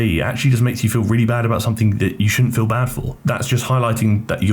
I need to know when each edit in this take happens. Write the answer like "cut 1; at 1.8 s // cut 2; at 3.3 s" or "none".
cut 1; at 3.1 s